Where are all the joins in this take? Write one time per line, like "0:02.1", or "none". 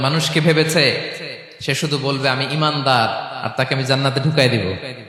none